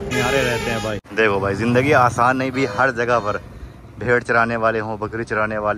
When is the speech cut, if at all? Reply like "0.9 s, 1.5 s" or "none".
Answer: 1.0 s